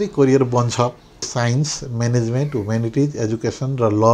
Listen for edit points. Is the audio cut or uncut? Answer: cut